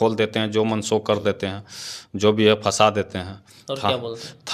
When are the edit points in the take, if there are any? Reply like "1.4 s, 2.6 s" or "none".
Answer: none